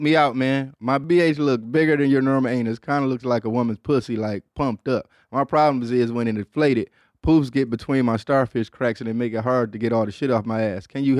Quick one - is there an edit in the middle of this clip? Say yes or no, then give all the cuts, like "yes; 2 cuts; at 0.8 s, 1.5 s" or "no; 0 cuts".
yes; 1 cut; at 1.0 s